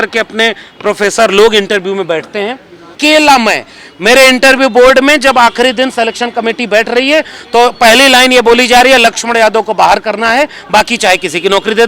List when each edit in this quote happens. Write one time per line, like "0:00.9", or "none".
0:03.0